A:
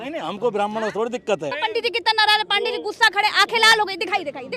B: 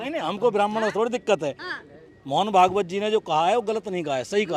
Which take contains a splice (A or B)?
A